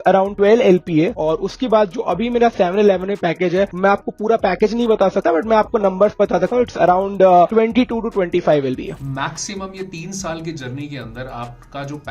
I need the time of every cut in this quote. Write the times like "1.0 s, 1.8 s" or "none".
1.1 s, 8.9 s